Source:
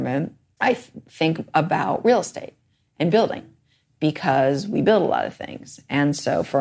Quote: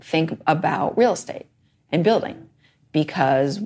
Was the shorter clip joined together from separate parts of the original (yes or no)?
no